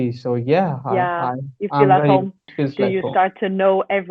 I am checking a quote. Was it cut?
yes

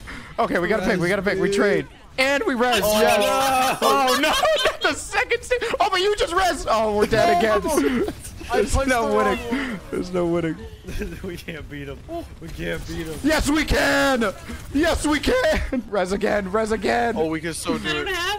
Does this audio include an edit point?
no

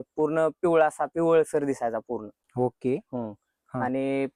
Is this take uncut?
yes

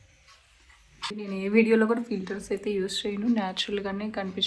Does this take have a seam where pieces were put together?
yes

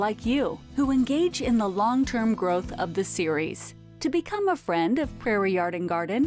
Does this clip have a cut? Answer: no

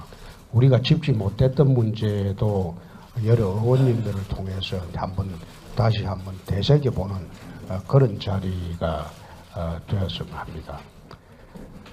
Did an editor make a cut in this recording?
yes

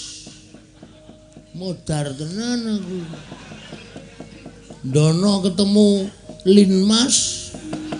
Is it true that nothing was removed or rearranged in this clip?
yes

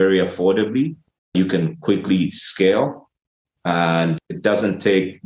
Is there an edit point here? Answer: yes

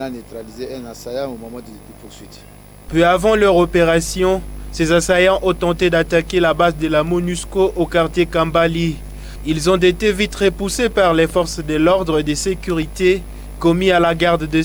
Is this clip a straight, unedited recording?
yes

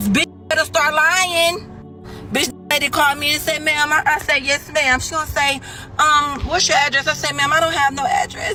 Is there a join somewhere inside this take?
no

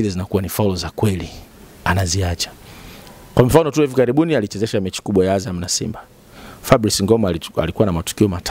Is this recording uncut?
yes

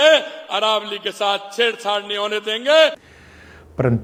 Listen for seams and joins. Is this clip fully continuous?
yes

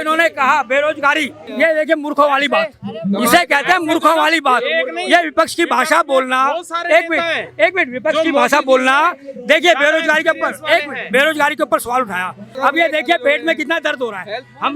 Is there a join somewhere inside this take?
yes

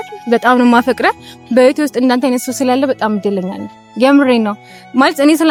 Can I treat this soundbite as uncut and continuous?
yes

